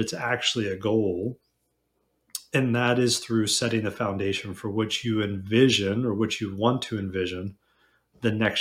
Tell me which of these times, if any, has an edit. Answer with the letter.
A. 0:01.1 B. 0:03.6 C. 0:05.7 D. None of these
D